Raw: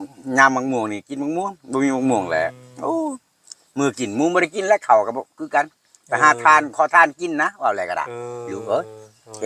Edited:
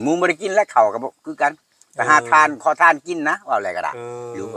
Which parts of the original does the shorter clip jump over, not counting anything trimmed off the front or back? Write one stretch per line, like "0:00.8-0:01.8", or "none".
none